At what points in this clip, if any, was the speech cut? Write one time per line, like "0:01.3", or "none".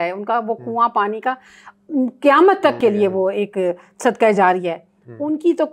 none